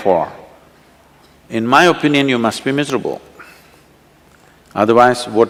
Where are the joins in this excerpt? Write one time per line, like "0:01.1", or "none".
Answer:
none